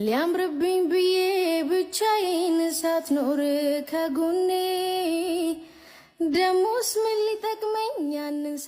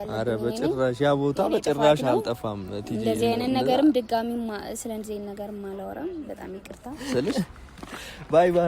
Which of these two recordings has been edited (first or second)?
second